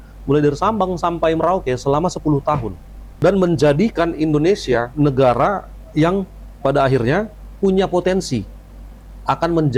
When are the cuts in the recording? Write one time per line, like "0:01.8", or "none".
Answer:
none